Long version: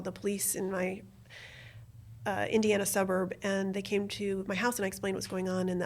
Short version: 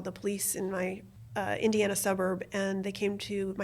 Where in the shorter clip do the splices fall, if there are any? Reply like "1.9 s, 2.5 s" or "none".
1.1 s